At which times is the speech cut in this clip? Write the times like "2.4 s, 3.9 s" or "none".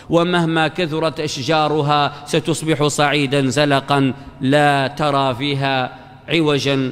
none